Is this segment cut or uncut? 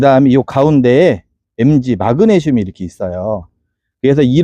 uncut